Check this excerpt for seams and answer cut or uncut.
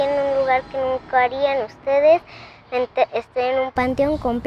uncut